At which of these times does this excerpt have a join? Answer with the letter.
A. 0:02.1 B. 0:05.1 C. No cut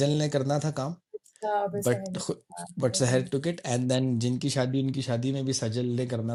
C